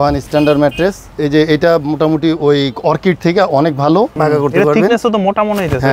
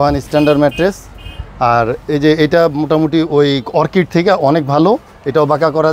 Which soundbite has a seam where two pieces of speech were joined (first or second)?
first